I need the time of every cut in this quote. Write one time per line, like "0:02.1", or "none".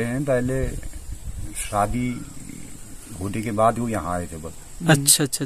none